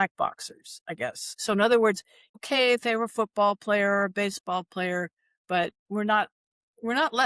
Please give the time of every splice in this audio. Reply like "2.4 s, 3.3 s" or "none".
1.2 s, 2.4 s